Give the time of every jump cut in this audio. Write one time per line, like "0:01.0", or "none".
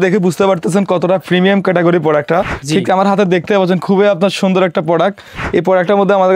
0:02.6

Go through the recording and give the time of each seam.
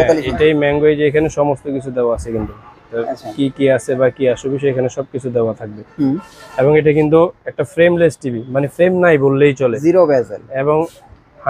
none

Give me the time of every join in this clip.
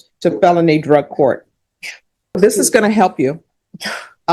0:02.4

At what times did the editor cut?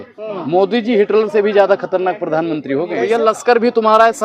0:03.0

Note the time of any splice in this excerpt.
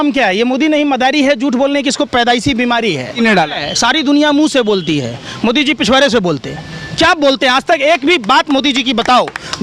0:03.1

